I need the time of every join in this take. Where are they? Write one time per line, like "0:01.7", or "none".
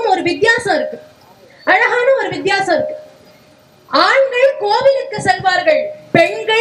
none